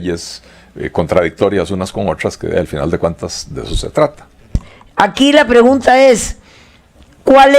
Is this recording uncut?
no; 1 cut; at 4.6 s

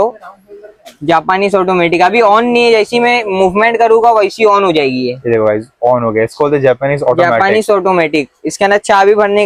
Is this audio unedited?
yes; 0 cuts

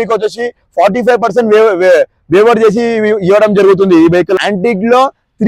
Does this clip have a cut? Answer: yes; 1 cut; at 4.4 s

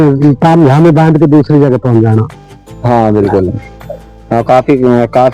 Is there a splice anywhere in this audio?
no; 0 cuts

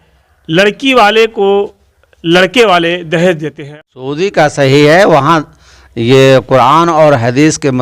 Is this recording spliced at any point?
yes; 1 cut; at 3.6 s

